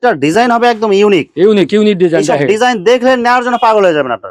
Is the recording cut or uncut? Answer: uncut